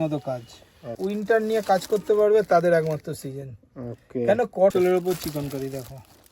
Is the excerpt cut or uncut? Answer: cut